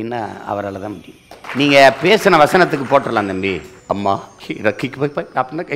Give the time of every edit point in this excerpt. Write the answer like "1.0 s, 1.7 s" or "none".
1.4 s, 3.7 s, 4.4 s